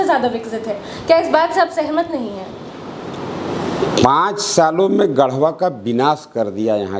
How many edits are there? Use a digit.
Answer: 0